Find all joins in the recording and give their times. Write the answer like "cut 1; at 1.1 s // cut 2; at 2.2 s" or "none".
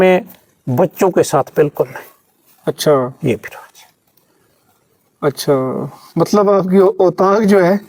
none